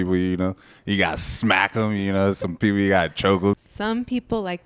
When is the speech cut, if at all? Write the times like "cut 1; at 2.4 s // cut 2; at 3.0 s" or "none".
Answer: cut 1; at 3.5 s